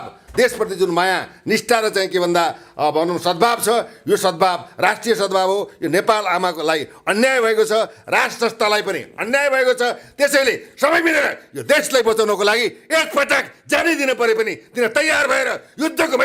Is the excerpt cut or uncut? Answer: uncut